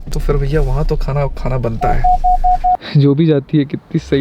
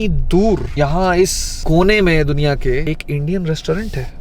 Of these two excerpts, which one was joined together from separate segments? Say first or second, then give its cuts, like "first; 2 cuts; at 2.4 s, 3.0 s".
first; 1 cut; at 2.8 s